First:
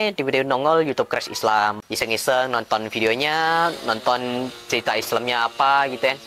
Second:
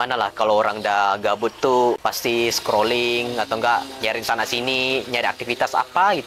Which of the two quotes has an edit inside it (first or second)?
second